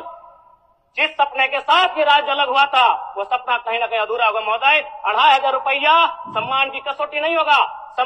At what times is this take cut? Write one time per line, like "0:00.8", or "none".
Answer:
none